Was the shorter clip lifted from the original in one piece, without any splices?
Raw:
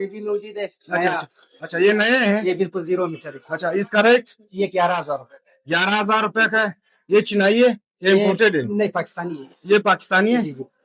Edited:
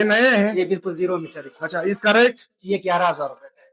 yes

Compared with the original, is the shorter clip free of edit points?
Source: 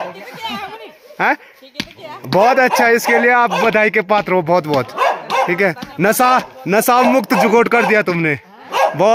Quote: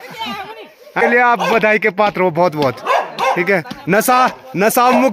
no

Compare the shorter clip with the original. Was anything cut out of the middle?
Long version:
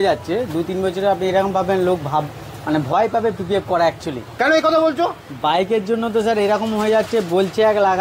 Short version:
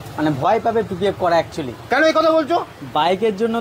no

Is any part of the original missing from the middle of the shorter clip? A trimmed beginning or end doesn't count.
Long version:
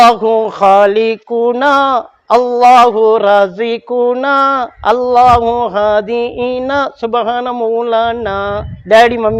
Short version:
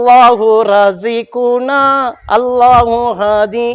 no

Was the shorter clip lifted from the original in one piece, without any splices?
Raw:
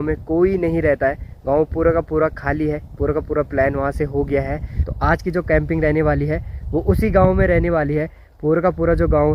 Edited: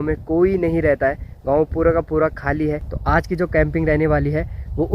no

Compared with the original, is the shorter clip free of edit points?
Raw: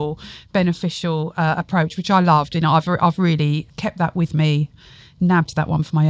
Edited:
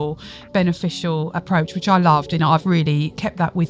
no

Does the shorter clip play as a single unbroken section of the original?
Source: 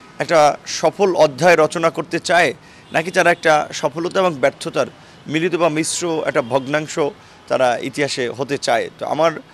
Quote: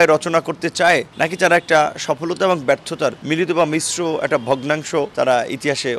no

